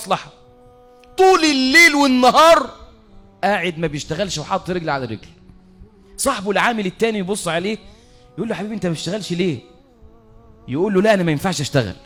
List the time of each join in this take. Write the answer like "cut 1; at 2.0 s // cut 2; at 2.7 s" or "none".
none